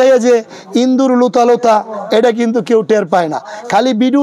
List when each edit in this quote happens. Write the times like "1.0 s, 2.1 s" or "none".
none